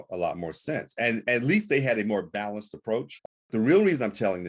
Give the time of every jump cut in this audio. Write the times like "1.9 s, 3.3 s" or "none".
3.4 s